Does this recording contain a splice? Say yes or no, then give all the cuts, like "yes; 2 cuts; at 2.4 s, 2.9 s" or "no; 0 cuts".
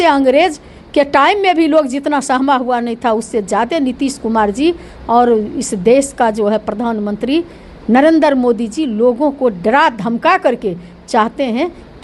no; 0 cuts